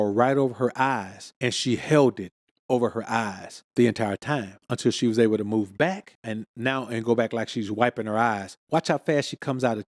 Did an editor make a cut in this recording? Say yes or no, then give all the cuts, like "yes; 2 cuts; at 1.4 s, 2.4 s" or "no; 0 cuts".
no; 0 cuts